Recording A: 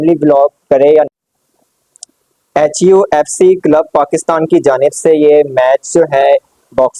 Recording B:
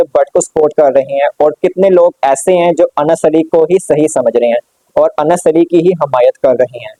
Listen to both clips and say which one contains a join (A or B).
A